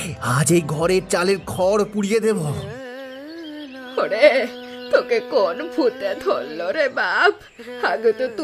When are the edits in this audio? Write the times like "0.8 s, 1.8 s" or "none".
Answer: none